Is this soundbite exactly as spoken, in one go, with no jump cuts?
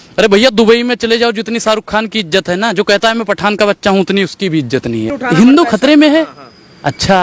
no; 1 cut; at 5.2 s

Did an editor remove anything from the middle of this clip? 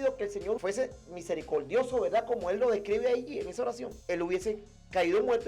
yes; 1 cut; at 3.9 s

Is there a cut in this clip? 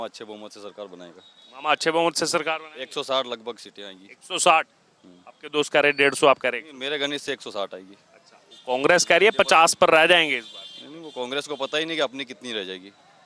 no; 0 cuts

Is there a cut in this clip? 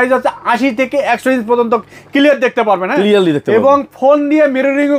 no; 0 cuts

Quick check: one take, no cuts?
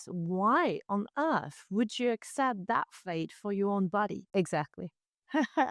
no; 1 cut; at 4.2 s

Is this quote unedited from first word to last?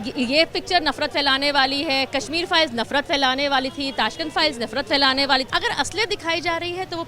no; 1 cut; at 5.5 s

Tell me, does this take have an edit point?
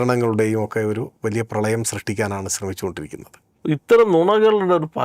yes; 1 cut; at 3.5 s

